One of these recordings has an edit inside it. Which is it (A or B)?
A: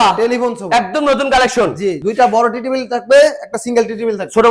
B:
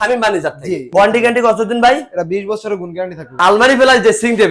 B